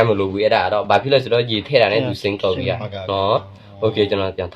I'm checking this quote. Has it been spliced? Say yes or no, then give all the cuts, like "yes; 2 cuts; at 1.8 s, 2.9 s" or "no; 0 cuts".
no; 0 cuts